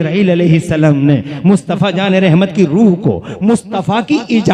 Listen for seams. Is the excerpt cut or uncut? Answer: uncut